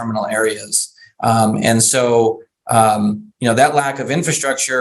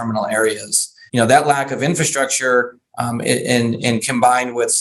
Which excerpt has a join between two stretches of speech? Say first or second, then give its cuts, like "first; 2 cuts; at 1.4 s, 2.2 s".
second; 1 cut; at 1.0 s